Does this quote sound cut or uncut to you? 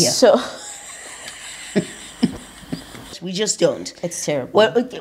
cut